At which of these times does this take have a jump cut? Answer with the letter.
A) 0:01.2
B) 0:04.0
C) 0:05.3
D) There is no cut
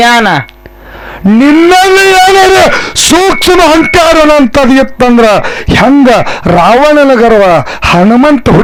D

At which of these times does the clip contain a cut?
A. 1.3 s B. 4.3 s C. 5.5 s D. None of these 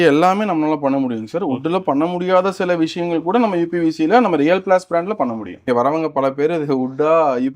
C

